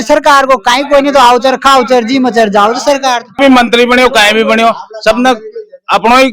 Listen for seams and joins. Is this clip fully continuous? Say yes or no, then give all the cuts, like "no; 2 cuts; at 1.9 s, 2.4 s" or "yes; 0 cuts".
no; 1 cut; at 3.4 s